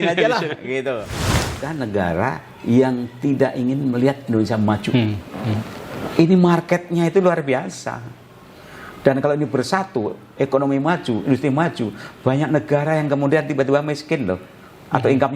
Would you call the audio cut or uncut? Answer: cut